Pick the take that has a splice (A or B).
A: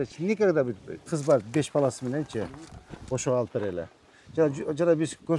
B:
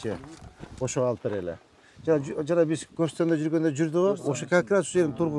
A